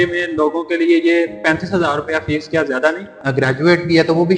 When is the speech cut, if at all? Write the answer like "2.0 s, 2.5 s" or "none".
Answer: 3.1 s

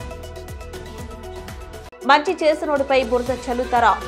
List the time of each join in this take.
1.4 s

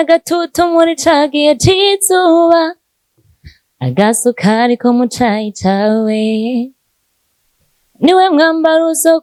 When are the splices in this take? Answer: none

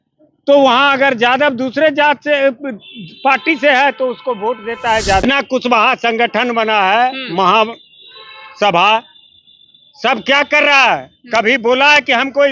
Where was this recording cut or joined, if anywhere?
5.2 s

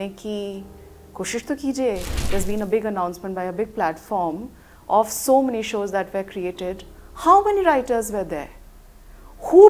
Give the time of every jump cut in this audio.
2.1 s

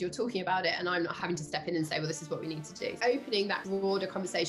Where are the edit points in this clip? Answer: 1.2 s, 3.0 s, 3.6 s

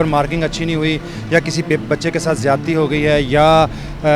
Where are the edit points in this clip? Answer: none

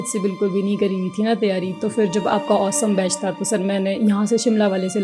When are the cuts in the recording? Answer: none

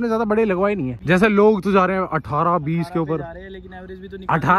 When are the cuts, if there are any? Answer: 1.0 s

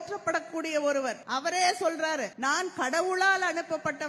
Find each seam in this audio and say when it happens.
1.2 s, 2.3 s

